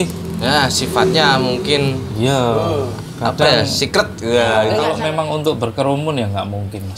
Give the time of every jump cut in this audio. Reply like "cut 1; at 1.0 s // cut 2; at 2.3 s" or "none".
cut 1; at 4.9 s